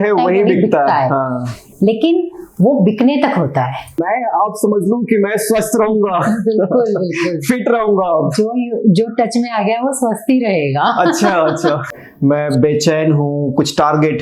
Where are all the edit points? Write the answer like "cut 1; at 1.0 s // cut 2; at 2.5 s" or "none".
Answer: cut 1; at 4.0 s // cut 2; at 12.0 s